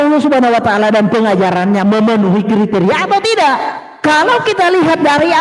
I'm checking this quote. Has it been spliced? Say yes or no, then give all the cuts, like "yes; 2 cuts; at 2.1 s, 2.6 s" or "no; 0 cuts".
no; 0 cuts